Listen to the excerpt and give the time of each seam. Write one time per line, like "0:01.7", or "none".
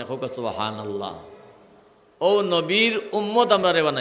none